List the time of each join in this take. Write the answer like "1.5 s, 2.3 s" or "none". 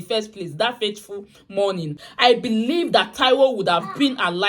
1.9 s